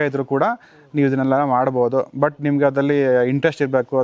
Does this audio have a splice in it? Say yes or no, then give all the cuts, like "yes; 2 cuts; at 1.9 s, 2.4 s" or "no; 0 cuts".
no; 0 cuts